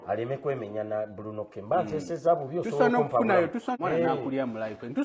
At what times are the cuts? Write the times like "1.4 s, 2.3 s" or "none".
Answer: 3.8 s